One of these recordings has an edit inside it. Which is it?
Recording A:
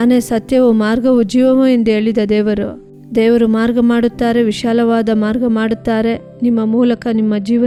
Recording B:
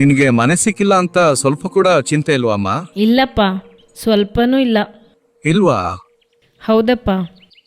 B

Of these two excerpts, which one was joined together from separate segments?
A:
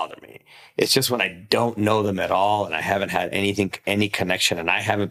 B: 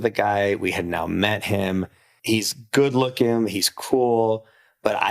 B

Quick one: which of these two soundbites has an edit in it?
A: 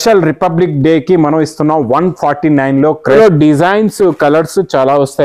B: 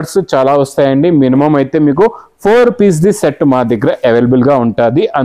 A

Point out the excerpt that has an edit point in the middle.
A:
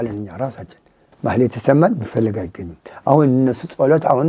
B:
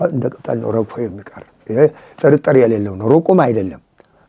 A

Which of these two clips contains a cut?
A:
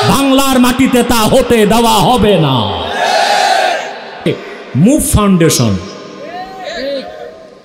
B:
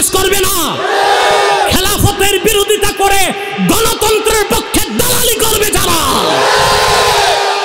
A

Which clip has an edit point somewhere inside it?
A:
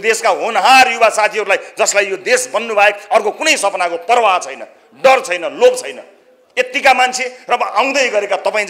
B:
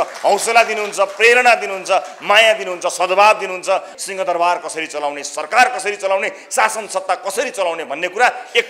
B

